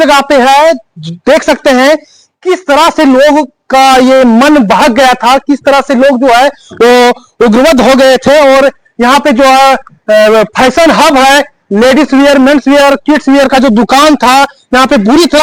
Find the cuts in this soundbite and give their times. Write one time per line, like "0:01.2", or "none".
none